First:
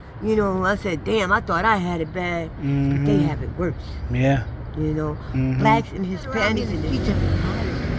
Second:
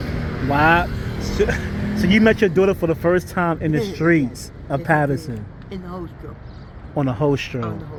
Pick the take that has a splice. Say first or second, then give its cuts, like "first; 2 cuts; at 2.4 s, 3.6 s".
first; 1 cut; at 6.8 s